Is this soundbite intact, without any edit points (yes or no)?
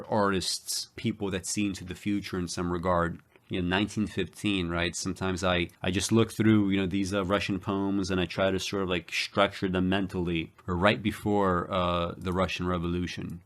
yes